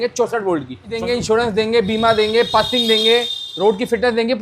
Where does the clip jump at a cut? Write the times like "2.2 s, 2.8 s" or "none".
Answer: 1.0 s